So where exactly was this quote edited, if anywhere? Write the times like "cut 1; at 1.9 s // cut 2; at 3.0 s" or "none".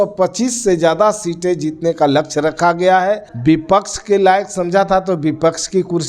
cut 1; at 3.3 s